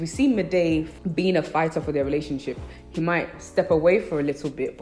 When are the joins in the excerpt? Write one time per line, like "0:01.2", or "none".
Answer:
0:00.9